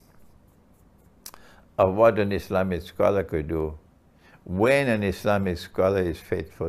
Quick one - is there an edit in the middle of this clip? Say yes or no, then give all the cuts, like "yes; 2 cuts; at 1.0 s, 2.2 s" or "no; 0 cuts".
no; 0 cuts